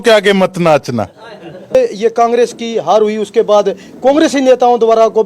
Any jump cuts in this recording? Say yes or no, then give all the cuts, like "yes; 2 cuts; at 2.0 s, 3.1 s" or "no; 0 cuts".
yes; 1 cut; at 1.7 s